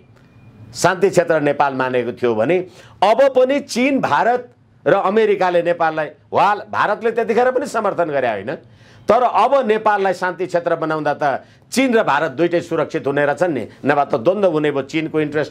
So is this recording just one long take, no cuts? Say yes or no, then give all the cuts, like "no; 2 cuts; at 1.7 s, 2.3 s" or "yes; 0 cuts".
yes; 0 cuts